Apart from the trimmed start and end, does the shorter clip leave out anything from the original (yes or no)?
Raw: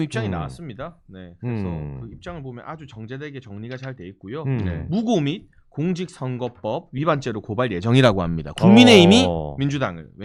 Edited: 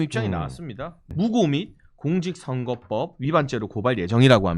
yes